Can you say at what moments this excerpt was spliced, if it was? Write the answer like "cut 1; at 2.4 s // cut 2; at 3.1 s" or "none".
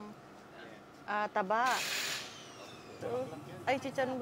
cut 1; at 3.0 s